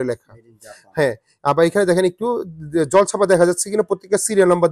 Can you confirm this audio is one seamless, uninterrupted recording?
yes; 0 cuts

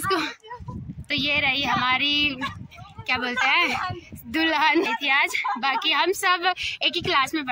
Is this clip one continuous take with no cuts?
no; 1 cut; at 4.9 s

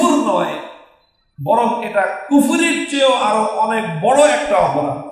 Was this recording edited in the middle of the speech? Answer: no; 0 cuts

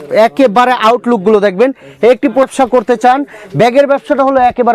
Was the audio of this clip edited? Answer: yes; 1 cut; at 2.5 s

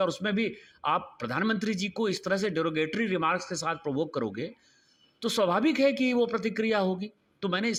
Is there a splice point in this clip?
no; 0 cuts

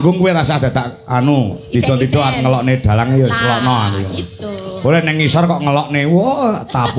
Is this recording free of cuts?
yes; 0 cuts

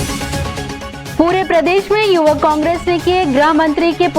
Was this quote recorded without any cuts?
no; 1 cut; at 1.1 s

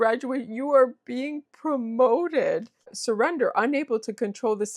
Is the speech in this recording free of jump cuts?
no; 1 cut; at 2.9 s

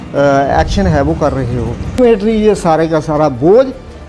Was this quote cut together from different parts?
yes; 1 cut; at 2.0 s

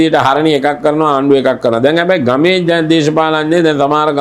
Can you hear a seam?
no; 0 cuts

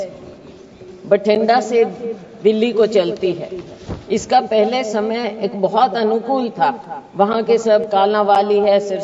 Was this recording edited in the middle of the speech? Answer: no; 0 cuts

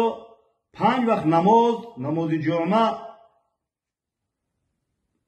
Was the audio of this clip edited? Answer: no; 0 cuts

